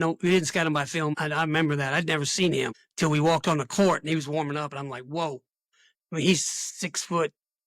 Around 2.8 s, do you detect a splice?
yes; 2 cuts; at 1.2 s, 2.8 s

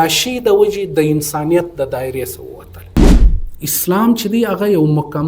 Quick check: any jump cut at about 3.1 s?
yes; 1 cut; at 3.1 s

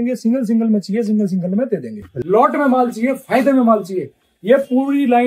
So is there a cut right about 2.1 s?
yes; 1 cut; at 2.1 s

